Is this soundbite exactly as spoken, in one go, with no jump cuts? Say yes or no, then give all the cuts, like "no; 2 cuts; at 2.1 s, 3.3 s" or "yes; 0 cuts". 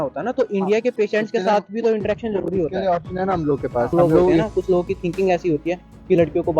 no; 1 cut; at 4.4 s